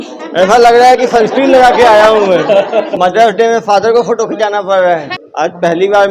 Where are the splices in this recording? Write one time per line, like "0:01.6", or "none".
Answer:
0:02.9
0:05.2